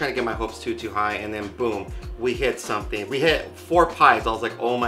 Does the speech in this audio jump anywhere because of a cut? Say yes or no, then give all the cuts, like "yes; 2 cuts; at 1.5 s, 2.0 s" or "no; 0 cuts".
no; 0 cuts